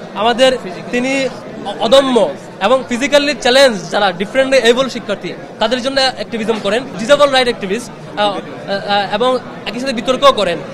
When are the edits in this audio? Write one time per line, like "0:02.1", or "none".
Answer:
0:06.9

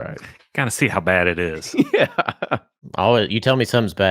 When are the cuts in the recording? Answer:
0:02.9

